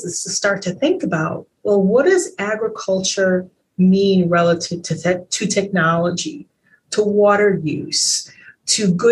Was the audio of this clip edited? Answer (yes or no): no